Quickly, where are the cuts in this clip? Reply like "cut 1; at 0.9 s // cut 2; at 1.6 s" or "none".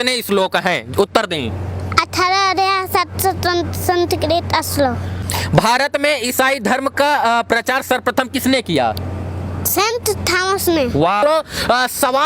cut 1; at 5.2 s // cut 2; at 11.2 s